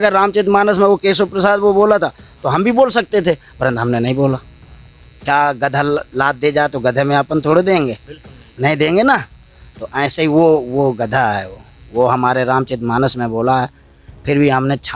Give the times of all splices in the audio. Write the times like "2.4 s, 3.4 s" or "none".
none